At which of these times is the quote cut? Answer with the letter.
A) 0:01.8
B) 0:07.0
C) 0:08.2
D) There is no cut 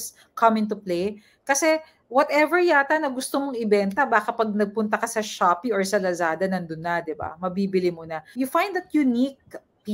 C